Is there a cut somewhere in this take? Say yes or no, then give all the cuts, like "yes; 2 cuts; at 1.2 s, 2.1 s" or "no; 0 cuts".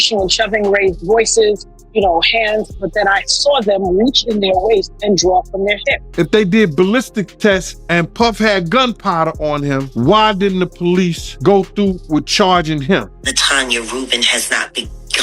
yes; 5 cuts; at 6.0 s, 7.8 s, 9.9 s, 11.3 s, 13.2 s